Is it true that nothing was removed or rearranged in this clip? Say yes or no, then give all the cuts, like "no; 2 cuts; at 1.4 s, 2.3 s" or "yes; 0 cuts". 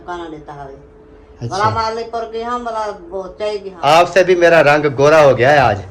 no; 1 cut; at 3.7 s